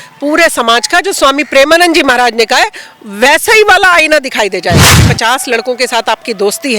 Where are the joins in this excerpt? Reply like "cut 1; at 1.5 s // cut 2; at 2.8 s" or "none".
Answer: cut 1; at 5.0 s